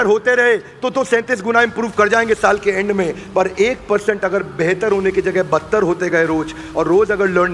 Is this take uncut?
yes; 0 cuts

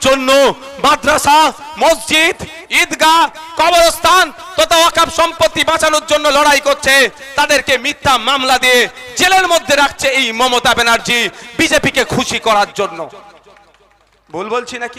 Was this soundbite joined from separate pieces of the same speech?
no; 0 cuts

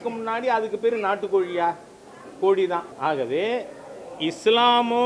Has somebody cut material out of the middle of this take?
yes; 1 cut; at 2.9 s

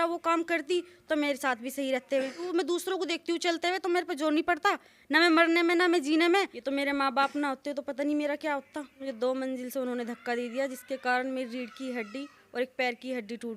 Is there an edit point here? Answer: yes; 3 cuts; at 2.5 s, 6.6 s, 9.0 s

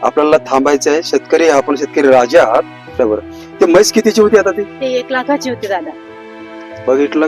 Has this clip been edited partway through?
yes; 1 cut; at 3.0 s

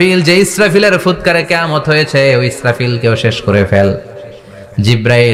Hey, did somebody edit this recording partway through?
no; 0 cuts

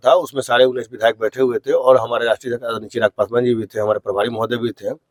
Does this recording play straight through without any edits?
yes; 0 cuts

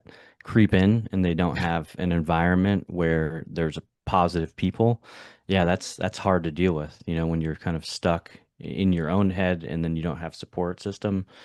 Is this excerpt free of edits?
yes; 0 cuts

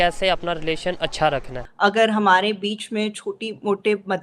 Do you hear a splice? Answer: yes; 1 cut; at 1.6 s

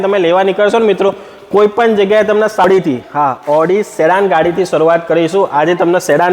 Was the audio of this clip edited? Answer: yes; 1 cut; at 2.6 s

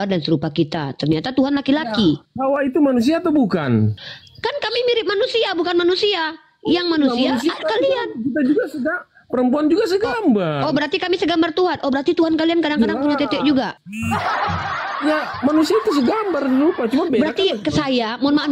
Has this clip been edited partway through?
no; 0 cuts

